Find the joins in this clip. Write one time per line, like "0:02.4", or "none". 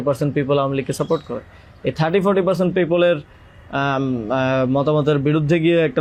none